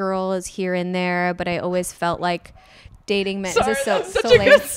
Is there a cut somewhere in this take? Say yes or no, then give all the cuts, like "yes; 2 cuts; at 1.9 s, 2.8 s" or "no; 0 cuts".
no; 0 cuts